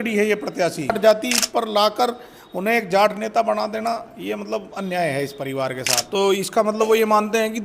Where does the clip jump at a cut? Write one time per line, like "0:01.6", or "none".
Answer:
0:01.0
0:06.0